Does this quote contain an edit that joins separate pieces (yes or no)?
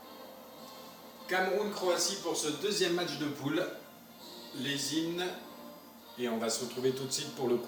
no